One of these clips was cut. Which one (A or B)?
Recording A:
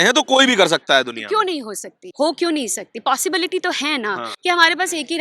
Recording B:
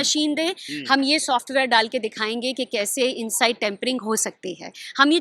A